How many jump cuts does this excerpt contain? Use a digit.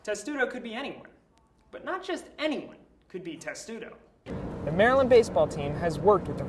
1